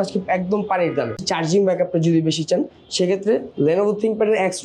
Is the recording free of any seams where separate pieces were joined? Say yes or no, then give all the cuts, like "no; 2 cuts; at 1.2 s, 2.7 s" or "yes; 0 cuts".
no; 1 cut; at 1.2 s